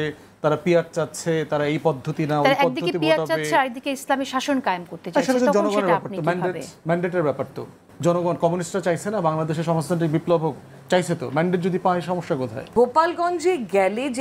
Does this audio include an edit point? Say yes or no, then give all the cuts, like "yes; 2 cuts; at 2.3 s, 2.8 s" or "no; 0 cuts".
yes; 1 cut; at 12.6 s